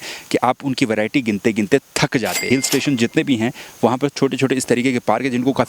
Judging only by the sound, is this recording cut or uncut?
cut